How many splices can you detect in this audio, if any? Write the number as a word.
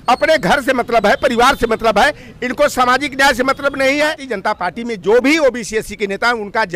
one